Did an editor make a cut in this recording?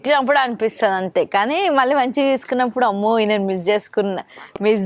no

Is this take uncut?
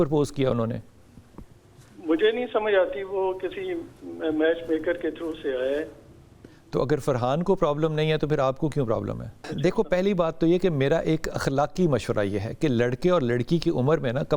no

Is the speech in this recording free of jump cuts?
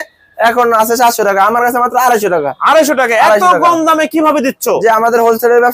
yes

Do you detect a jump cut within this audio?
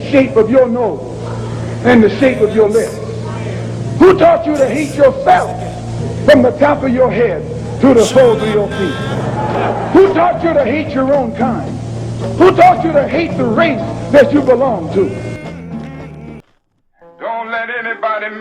yes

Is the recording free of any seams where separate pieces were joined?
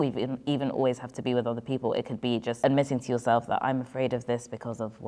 no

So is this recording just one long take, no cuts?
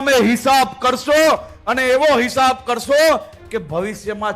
yes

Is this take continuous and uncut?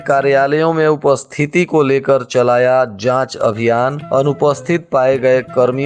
yes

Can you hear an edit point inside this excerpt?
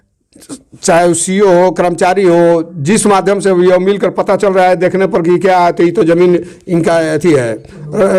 no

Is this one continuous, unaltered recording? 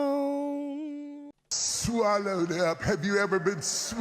no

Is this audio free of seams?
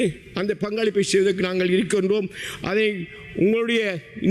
yes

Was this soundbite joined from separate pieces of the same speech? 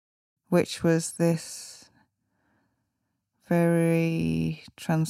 no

